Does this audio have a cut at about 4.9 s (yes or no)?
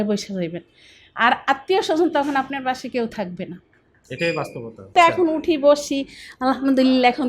yes